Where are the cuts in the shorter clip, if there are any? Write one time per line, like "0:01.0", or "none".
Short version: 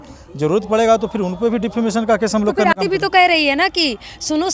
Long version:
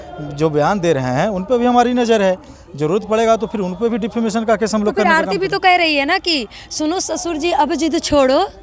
0:02.8